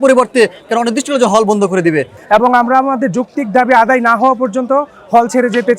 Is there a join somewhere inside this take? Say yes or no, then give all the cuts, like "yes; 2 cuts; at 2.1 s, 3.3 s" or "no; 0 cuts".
yes; 1 cut; at 2.2 s